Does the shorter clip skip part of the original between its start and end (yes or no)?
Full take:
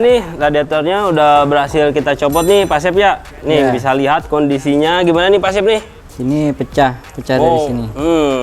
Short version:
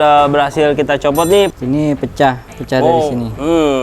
yes